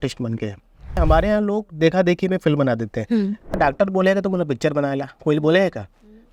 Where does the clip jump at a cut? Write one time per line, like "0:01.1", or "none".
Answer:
0:01.0
0:03.6

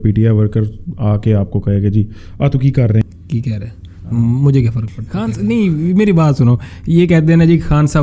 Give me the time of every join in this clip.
0:05.4

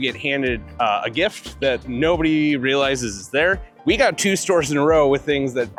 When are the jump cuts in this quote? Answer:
none

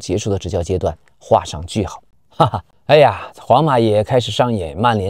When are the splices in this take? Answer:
0:02.1

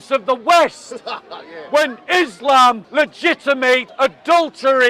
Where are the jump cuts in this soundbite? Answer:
0:02.8
0:03.9

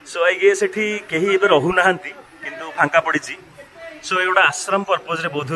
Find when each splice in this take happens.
none

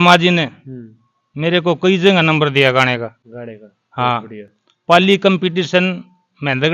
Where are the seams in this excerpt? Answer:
none

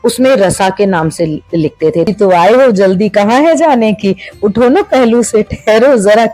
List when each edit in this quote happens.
0:02.1

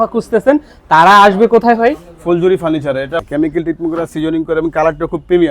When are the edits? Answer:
0:03.2

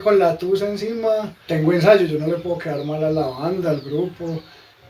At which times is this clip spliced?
0:01.4

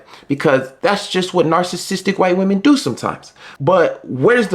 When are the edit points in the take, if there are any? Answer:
0:03.5

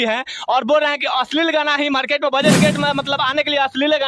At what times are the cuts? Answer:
0:02.5

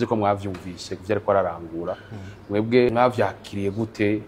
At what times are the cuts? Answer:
0:02.9

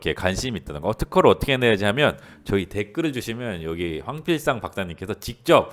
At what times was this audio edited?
none

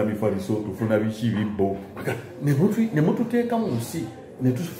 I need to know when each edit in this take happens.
0:01.9

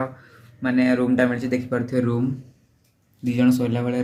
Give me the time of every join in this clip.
none

